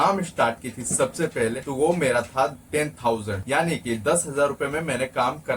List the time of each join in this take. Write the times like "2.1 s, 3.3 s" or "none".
1.6 s, 3.3 s